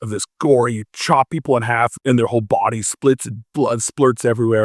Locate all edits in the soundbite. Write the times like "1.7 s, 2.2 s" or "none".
2.0 s